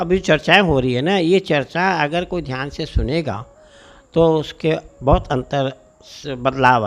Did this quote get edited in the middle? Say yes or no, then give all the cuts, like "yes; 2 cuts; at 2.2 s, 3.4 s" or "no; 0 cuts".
no; 0 cuts